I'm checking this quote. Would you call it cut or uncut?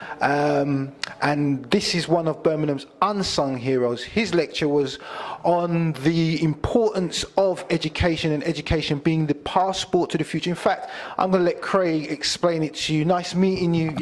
cut